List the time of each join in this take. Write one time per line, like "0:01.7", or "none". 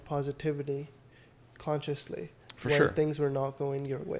none

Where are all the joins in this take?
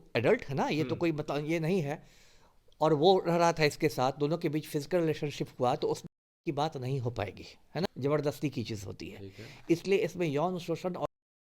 0:07.9

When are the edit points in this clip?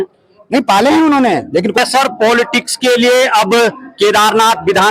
0:01.8

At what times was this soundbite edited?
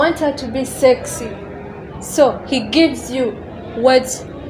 none

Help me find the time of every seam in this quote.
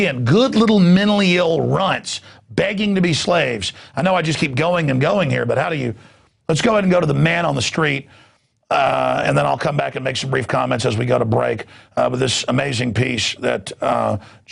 0:11.1

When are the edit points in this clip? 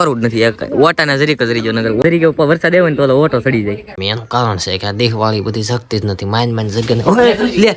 0:02.0
0:03.9

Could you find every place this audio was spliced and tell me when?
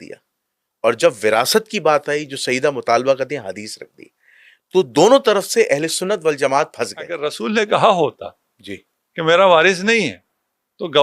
0:07.2

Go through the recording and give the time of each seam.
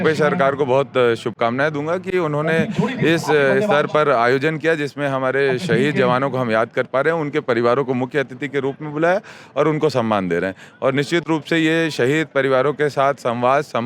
none

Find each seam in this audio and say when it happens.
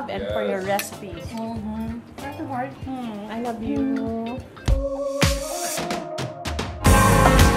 0:04.9

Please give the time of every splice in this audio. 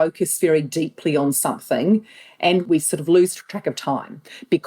0:02.6

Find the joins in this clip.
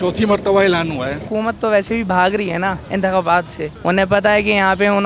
0:01.3
0:02.8
0:03.6

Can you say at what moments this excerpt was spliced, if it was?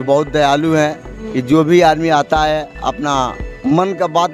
none

